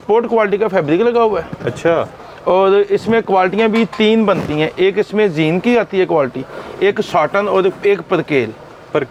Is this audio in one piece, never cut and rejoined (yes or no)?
yes